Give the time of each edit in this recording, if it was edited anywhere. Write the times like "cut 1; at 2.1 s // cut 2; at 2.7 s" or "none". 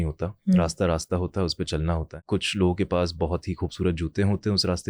cut 1; at 2.2 s